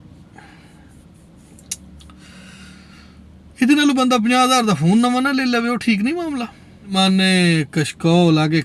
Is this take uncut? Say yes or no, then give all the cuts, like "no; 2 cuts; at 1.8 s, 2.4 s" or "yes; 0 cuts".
no; 1 cut; at 7.0 s